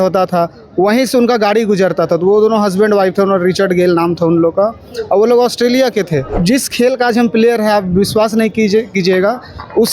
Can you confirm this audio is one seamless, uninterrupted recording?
no; 1 cut; at 6.3 s

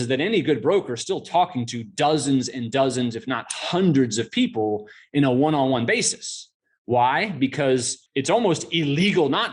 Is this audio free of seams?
no; 1 cut; at 8.0 s

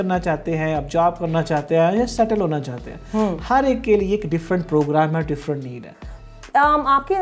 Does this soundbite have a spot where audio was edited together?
no; 0 cuts

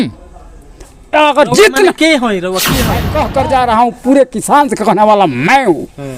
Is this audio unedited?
no; 1 cut; at 3.1 s

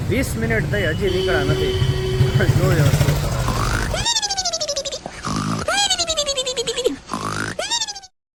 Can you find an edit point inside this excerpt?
no; 0 cuts

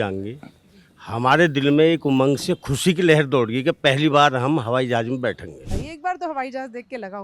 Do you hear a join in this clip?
yes; 1 cut; at 5.7 s

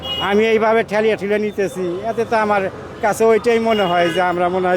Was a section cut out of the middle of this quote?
no; 0 cuts

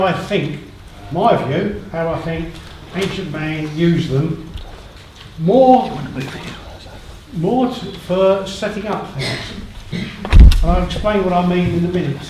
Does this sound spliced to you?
no; 0 cuts

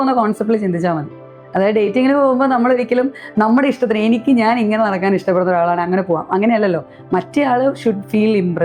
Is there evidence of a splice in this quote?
no; 0 cuts

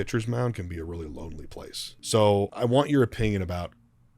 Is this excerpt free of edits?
no; 2 cuts; at 1.9 s, 2.5 s

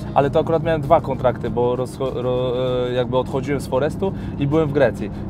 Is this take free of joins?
yes; 0 cuts

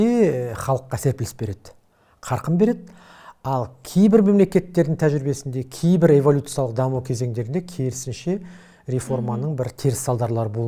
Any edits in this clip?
no; 0 cuts

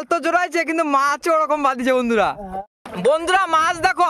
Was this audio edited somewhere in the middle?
yes; 1 cut; at 2.4 s

